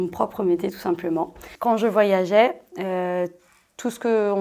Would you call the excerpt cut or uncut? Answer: cut